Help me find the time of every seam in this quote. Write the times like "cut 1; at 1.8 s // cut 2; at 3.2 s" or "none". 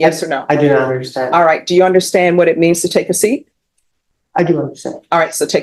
none